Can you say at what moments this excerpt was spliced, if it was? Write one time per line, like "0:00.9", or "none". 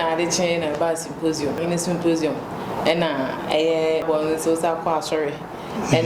0:01.6
0:04.0